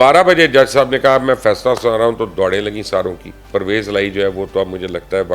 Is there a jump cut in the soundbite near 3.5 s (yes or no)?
yes